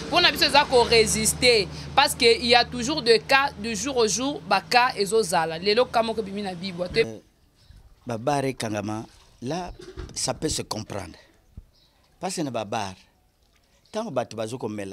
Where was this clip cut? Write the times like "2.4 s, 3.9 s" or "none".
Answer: 7.1 s